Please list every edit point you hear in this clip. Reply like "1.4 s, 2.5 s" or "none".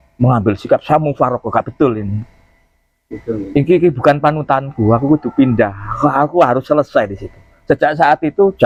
none